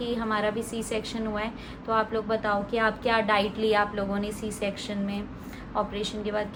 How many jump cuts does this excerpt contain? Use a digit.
0